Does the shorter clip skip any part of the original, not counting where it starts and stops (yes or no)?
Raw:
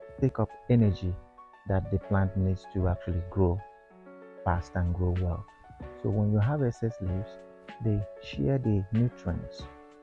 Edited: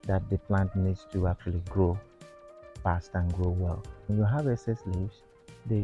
yes